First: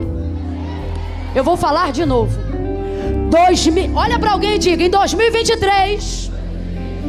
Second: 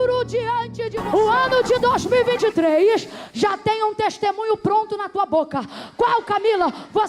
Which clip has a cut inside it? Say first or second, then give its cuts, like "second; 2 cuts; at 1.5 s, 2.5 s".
second; 1 cut; at 0.9 s